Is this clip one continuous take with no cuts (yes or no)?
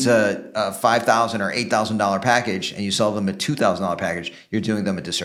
yes